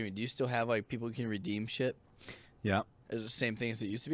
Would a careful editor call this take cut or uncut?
cut